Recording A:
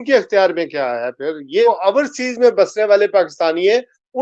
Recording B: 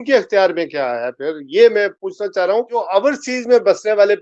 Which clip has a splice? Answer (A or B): A